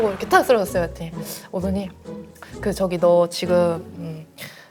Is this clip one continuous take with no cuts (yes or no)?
yes